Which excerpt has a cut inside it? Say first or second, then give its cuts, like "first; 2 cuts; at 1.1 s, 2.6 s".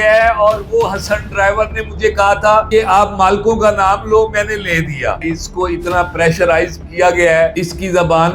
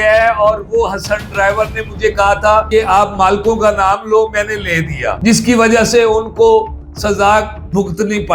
first; 2 cuts; at 5.2 s, 7.5 s